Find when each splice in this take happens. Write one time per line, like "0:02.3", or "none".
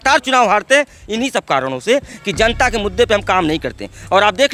none